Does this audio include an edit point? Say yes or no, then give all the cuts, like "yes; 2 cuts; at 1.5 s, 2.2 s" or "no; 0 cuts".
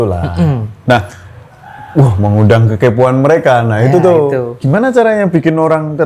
no; 0 cuts